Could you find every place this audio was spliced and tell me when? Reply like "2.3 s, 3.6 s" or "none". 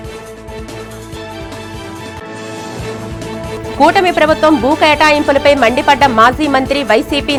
none